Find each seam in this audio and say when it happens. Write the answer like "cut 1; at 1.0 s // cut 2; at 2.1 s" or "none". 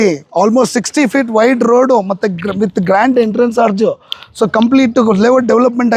none